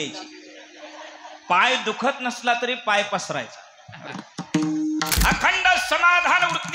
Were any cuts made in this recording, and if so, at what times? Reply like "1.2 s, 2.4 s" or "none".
5.1 s